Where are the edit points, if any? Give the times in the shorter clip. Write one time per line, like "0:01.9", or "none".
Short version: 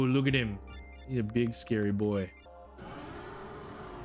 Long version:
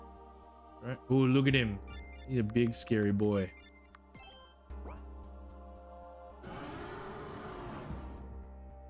0:02.5